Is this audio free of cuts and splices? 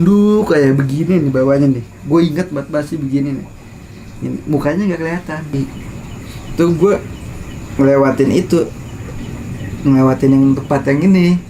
no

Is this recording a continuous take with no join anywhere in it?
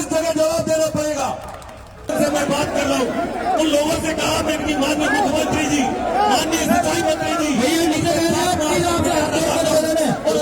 no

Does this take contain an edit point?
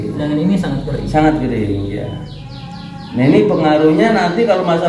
no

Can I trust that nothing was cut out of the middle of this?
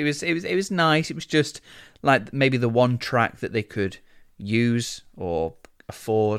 yes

